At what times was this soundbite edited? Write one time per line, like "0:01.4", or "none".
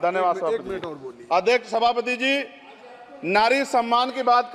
none